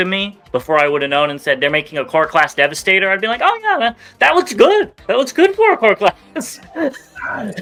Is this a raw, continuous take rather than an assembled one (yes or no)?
yes